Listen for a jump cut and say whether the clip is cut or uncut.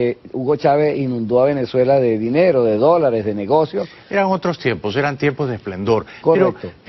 cut